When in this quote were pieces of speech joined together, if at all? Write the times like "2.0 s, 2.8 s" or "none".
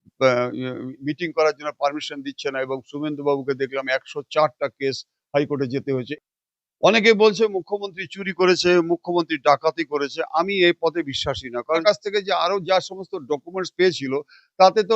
6.1 s, 11.8 s